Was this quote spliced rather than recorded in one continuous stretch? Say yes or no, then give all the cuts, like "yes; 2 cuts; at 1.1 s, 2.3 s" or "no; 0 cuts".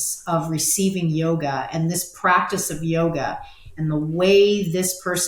no; 0 cuts